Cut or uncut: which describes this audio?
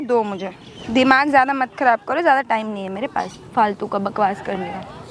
uncut